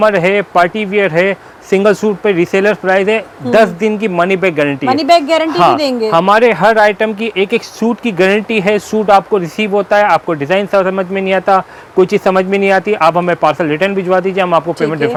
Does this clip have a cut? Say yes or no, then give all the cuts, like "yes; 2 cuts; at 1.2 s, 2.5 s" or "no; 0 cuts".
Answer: no; 0 cuts